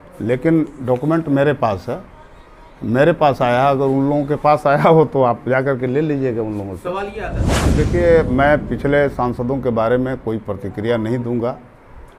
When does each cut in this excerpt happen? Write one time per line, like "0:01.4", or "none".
0:07.4